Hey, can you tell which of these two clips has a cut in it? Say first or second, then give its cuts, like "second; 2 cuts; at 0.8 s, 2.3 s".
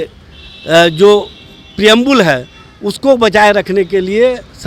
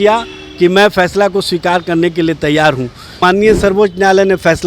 second; 1 cut; at 3.2 s